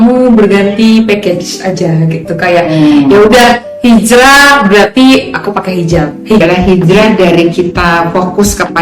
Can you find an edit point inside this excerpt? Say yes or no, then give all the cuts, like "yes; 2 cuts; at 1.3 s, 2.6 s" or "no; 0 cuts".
yes; 1 cut; at 6.4 s